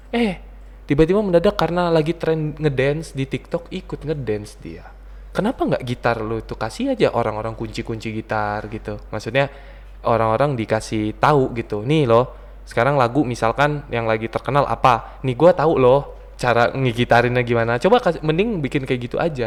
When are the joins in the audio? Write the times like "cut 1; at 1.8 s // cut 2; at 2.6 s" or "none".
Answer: none

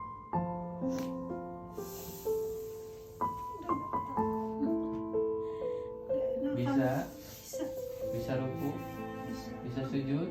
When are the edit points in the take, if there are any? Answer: none

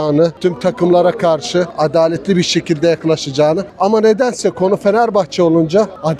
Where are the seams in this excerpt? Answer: none

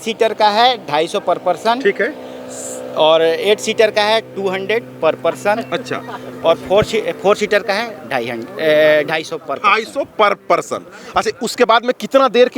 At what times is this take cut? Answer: none

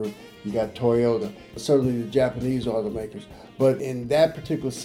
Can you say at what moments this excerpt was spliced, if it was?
cut 1; at 1.5 s // cut 2; at 3.8 s

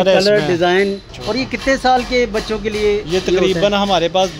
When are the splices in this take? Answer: cut 1; at 1.1 s

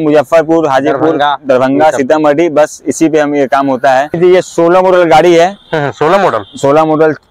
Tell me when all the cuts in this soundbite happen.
none

